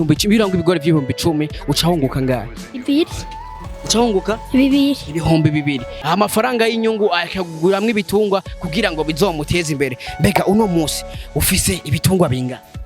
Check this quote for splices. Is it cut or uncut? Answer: cut